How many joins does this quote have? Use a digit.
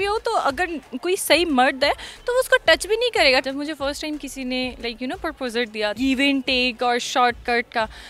3